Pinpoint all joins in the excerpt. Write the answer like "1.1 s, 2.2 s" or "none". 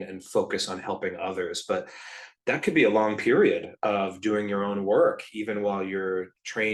none